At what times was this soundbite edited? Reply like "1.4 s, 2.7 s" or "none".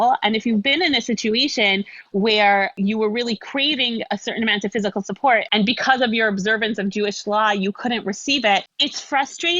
2.8 s, 5.5 s, 8.8 s